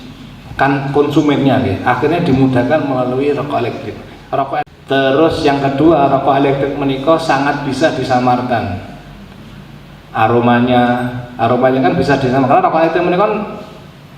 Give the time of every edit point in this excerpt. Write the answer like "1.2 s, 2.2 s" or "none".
4.6 s